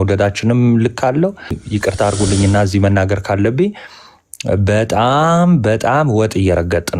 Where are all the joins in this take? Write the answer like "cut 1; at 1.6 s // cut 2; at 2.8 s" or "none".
cut 1; at 1.6 s